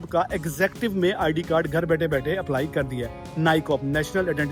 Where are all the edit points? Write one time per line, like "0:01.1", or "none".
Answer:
none